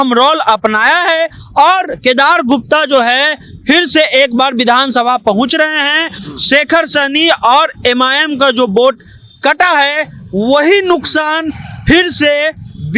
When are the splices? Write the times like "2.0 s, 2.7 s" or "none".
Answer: none